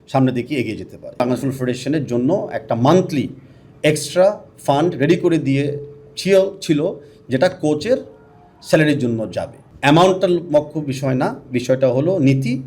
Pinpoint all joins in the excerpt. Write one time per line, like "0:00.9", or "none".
0:01.2
0:09.6

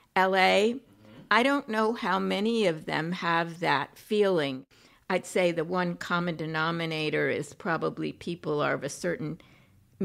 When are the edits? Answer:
0:04.6

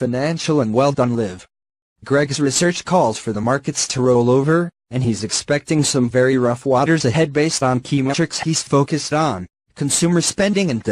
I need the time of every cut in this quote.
0:07.7

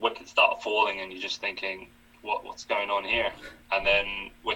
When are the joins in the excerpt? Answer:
none

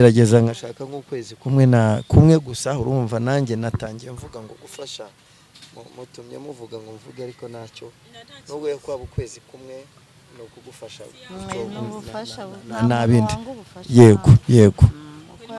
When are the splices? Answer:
none

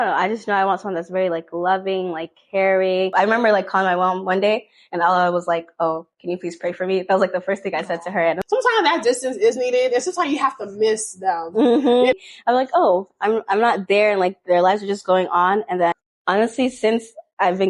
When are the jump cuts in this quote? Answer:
0:03.1
0:08.4
0:12.1
0:16.1

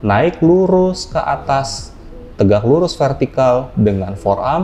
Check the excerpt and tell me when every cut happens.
none

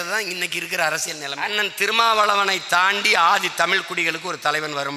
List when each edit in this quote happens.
0:01.3

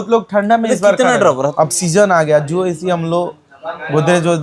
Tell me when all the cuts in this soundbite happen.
0:01.5

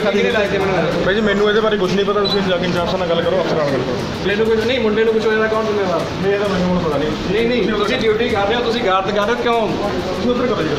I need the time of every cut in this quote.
0:04.2

